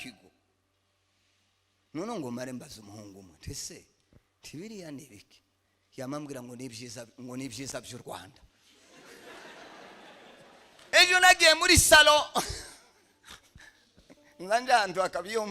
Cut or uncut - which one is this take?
cut